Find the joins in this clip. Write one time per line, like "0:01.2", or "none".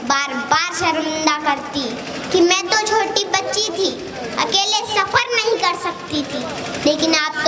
none